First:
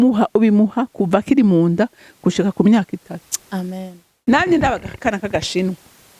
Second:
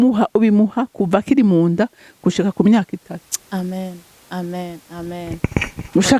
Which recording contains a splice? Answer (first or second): first